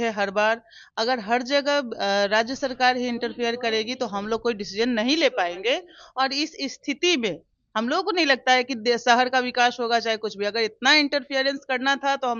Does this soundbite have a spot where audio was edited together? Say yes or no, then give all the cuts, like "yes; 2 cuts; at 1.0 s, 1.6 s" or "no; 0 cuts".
no; 0 cuts